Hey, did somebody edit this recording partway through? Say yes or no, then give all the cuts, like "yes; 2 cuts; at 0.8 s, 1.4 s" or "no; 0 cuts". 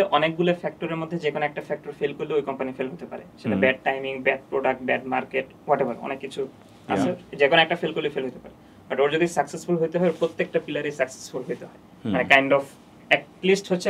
no; 0 cuts